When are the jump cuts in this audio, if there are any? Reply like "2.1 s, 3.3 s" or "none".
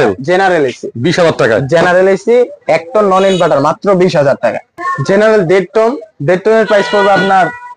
4.6 s